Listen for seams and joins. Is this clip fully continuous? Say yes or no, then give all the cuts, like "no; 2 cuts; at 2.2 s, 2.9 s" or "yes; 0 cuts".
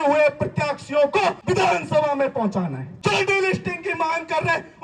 no; 2 cuts; at 1.4 s, 2.9 s